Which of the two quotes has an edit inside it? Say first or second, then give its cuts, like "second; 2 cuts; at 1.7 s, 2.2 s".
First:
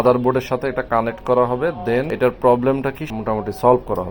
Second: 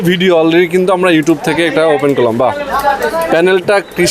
first; 2 cuts; at 2.1 s, 3.0 s